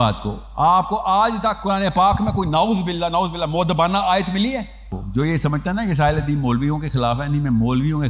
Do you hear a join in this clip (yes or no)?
yes